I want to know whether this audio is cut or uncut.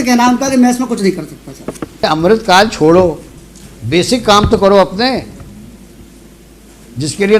cut